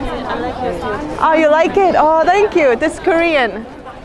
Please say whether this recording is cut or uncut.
uncut